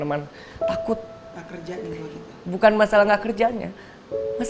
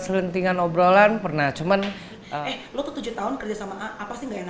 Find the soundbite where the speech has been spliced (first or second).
second